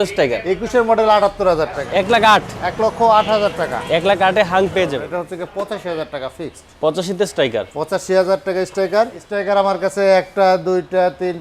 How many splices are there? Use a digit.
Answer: 3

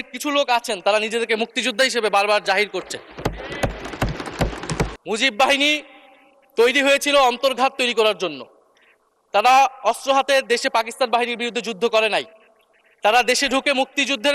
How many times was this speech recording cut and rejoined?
1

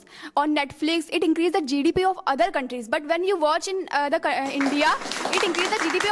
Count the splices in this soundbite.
0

